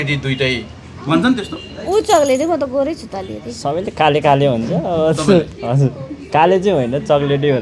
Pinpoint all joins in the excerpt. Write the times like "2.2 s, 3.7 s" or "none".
none